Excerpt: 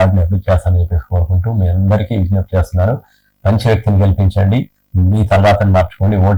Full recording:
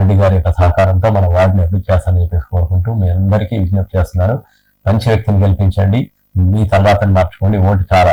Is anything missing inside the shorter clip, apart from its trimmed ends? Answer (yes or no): no